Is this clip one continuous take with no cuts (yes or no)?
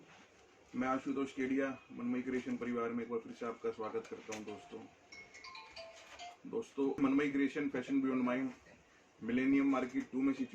no